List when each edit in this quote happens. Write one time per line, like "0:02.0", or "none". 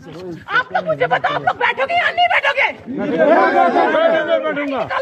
none